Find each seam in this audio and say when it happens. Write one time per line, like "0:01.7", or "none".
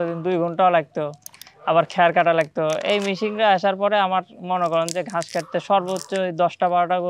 none